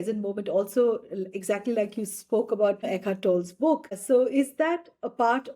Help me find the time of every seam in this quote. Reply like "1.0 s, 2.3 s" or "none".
2.9 s, 4.0 s